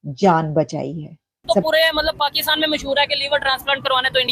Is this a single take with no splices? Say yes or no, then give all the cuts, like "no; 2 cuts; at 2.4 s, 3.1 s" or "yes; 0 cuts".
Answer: no; 1 cut; at 1.7 s